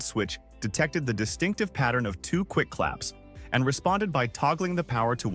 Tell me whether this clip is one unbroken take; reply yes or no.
yes